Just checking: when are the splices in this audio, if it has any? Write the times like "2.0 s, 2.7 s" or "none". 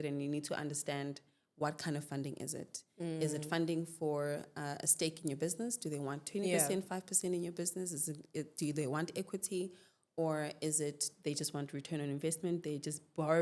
none